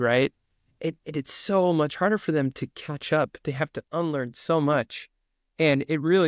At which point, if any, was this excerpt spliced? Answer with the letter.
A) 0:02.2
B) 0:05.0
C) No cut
C